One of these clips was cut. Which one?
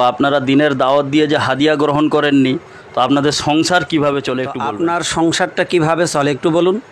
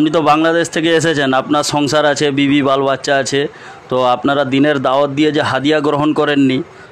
first; 1 cut; at 4.5 s

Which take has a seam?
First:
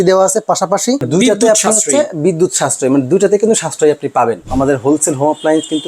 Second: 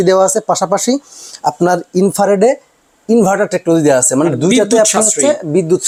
first; 2 cuts; at 1.1 s, 4.5 s

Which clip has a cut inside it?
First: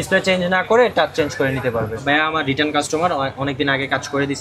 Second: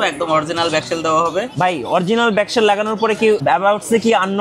first; 1 cut; at 2.0 s

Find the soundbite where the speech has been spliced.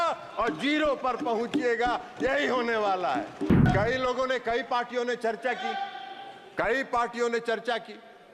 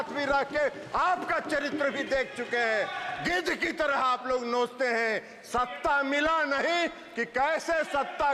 first; 1 cut; at 3.7 s

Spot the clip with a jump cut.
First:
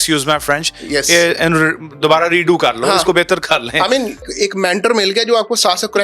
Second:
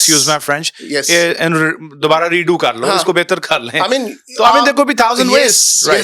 first; 1 cut; at 4.3 s

